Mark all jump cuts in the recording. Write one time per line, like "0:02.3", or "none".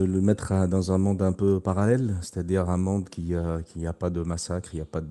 none